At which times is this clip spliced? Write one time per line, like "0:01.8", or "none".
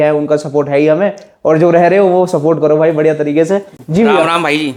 none